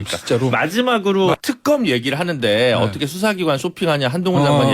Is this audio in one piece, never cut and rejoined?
no; 1 cut; at 1.4 s

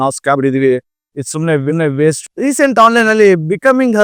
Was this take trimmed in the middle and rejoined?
no; 0 cuts

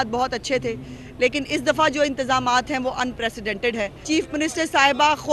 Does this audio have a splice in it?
yes; 1 cut; at 4.0 s

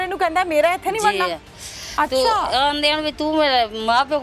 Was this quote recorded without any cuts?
yes; 0 cuts

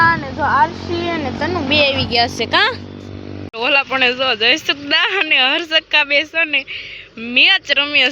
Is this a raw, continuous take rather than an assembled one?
no; 1 cut; at 3.4 s

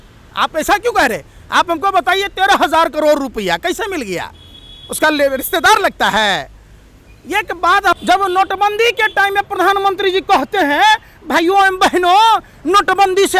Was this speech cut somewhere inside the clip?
yes; 1 cut; at 8.0 s

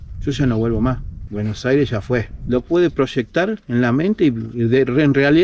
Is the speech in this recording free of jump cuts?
no; 1 cut; at 2.3 s

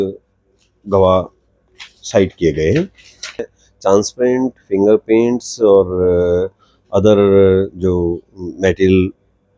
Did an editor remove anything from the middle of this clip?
yes; 1 cut; at 3.5 s

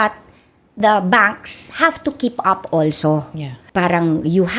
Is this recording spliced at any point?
yes; 1 cut; at 3.6 s

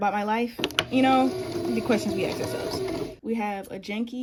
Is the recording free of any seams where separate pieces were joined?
yes; 0 cuts

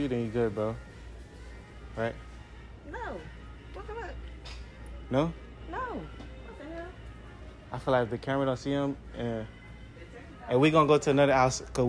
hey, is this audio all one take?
yes; 0 cuts

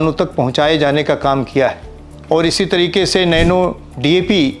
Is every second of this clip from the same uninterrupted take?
yes; 0 cuts

